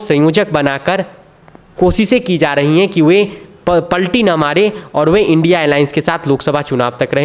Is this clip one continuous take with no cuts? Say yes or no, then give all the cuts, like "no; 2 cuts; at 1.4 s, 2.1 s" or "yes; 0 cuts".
yes; 0 cuts